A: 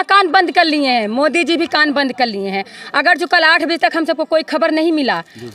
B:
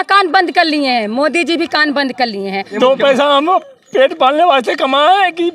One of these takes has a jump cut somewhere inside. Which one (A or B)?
B